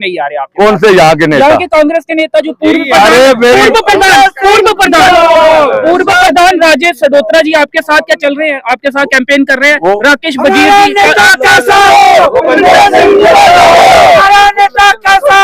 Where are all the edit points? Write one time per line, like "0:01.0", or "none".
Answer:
none